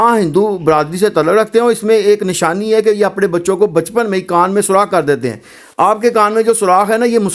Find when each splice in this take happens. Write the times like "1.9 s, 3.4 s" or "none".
none